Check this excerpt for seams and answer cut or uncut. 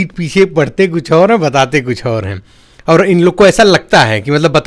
uncut